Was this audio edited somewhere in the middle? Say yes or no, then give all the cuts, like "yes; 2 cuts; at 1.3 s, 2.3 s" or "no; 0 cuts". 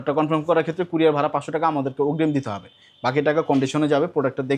no; 0 cuts